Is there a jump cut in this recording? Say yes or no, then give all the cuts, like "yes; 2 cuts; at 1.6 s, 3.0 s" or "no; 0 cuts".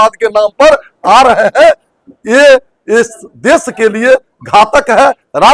no; 0 cuts